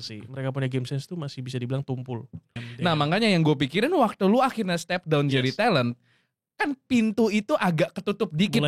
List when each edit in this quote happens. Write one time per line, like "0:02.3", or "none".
0:02.6